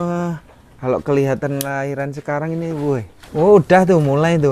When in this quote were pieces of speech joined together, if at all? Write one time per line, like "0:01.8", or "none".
0:03.2

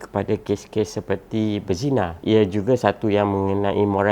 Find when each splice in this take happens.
0:02.2

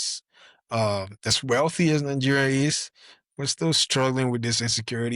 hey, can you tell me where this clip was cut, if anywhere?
none

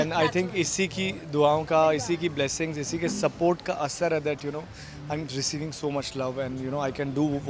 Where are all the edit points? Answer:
none

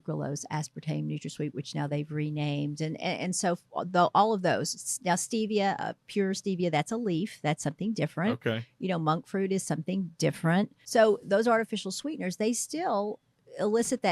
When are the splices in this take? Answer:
0:10.8

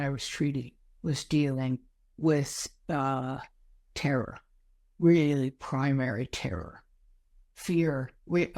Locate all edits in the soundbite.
none

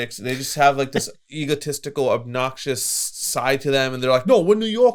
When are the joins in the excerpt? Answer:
none

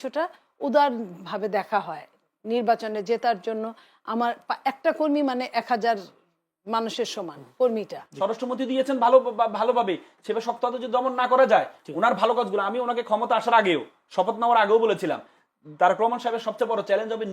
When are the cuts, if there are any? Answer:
0:08.0

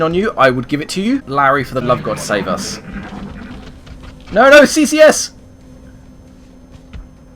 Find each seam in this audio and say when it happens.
0:01.2

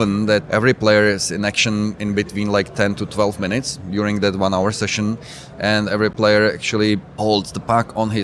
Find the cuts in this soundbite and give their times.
0:06.1

